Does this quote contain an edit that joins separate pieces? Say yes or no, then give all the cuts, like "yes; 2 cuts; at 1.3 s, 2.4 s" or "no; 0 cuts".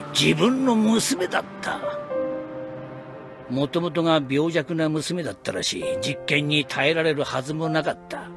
yes; 1 cut; at 1.7 s